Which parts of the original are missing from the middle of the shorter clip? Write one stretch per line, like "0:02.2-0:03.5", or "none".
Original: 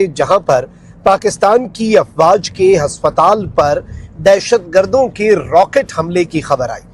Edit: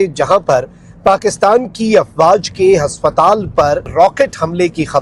0:03.9-0:05.4